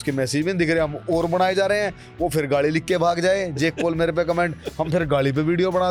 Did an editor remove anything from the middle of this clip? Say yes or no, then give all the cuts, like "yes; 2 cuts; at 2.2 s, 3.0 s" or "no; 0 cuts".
no; 0 cuts